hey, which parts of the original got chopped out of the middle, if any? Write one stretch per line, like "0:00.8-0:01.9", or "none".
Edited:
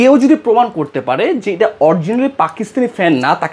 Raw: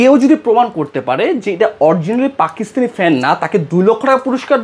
none